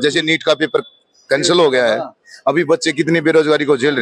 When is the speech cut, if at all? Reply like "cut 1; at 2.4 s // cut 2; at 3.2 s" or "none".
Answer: none